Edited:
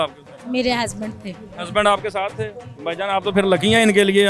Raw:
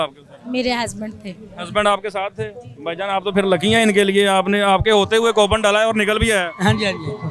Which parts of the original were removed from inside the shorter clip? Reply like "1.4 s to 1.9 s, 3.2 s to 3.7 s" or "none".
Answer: none